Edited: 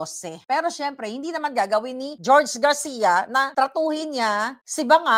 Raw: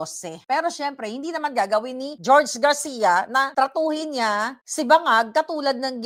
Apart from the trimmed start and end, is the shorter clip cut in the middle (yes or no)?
no